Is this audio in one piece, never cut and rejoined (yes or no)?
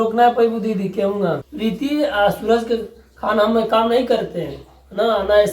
no